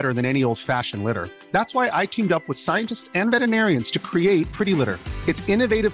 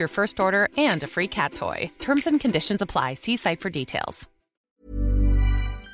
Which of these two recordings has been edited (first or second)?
second